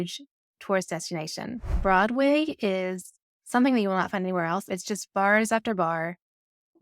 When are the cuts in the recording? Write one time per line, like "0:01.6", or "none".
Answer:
0:01.8
0:04.7